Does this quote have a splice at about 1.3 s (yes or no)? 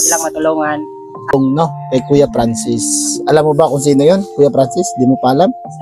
yes